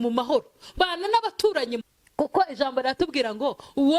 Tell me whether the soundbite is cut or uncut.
cut